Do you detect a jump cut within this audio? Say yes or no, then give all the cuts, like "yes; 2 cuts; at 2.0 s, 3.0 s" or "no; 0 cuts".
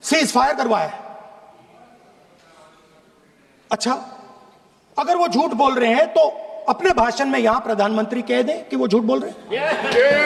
no; 0 cuts